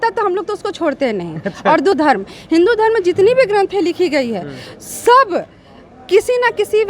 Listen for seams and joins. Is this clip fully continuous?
no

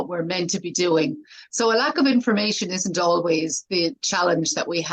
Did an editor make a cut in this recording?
no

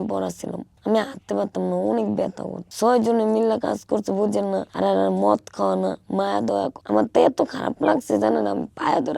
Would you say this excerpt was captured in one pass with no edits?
no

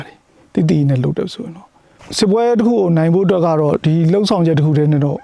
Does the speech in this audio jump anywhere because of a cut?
yes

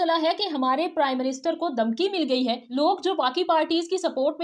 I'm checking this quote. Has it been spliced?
yes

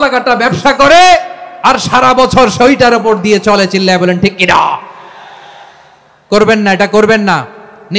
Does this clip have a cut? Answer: no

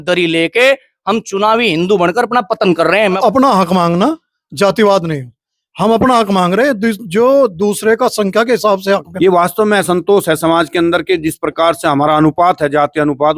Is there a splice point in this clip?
yes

